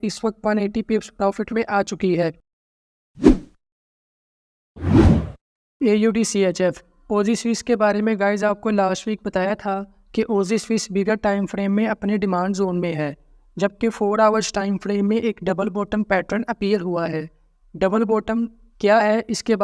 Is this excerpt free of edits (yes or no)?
yes